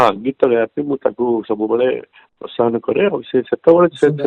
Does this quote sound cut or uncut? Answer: uncut